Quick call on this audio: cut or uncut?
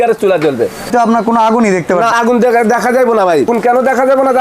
cut